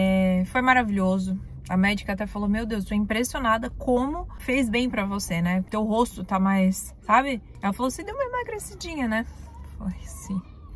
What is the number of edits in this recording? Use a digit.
3